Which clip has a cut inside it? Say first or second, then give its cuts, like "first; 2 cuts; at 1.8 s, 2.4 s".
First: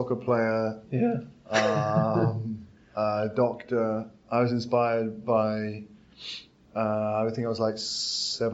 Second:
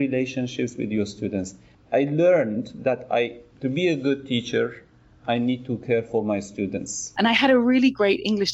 second; 2 cuts; at 1.6 s, 7.0 s